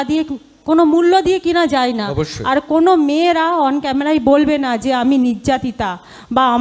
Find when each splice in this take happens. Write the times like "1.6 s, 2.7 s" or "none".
none